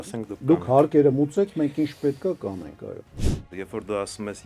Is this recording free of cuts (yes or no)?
no